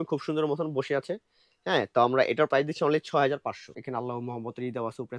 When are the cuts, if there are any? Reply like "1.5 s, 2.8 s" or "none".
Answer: 3.8 s